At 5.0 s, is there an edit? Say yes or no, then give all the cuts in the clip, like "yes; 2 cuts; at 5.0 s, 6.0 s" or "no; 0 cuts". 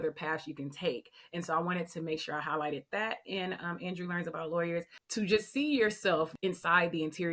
yes; 2 cuts; at 5.0 s, 6.3 s